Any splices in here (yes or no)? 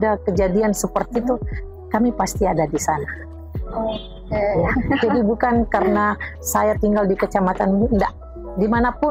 no